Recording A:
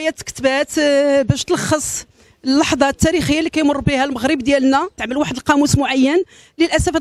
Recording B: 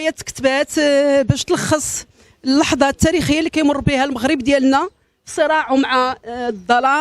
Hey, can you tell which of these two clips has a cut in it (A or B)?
B